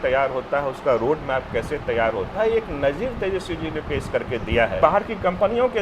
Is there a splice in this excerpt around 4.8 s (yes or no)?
yes